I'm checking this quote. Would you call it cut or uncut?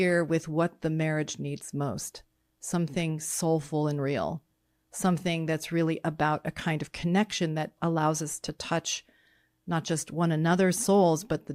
uncut